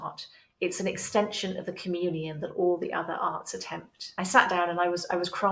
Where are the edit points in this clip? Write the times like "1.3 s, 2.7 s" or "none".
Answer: 4.1 s